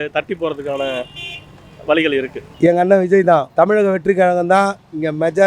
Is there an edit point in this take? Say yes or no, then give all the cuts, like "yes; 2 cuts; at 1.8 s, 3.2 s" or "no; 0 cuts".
yes; 2 cuts; at 2.4 s, 3.5 s